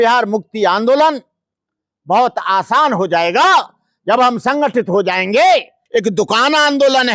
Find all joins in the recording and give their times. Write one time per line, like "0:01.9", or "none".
0:05.8